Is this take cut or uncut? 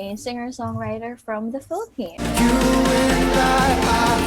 cut